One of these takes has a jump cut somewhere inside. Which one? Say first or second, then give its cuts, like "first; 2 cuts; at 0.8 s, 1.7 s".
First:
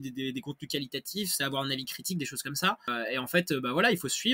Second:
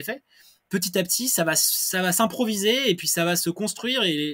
first; 1 cut; at 2.9 s